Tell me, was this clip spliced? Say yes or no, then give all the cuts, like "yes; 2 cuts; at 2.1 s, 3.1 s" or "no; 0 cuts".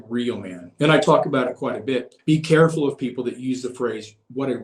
yes; 1 cut; at 2.1 s